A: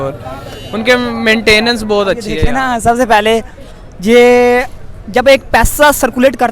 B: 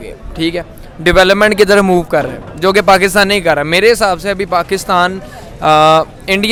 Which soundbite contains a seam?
A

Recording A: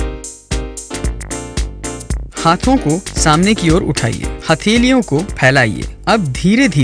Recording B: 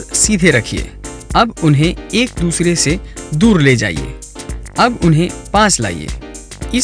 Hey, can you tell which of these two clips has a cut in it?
A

